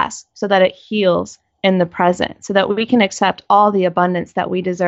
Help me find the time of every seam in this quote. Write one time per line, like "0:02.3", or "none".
none